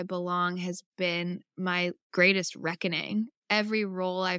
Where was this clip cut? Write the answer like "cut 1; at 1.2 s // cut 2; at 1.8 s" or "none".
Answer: cut 1; at 2.0 s // cut 2; at 3.3 s